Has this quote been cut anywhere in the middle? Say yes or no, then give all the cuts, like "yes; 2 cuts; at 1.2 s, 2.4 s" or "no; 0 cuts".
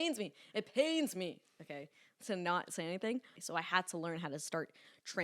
yes; 1 cut; at 3.4 s